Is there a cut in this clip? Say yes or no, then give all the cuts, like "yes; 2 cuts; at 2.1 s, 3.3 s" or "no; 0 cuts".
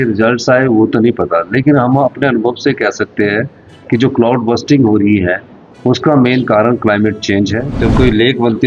yes; 1 cut; at 7.7 s